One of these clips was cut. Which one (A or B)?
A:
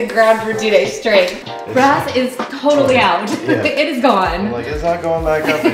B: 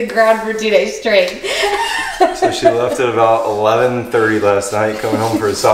A